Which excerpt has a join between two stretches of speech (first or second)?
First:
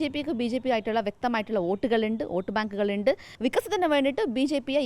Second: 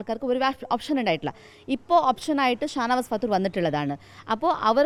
first